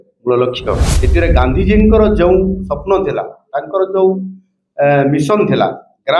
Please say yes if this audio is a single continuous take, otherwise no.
no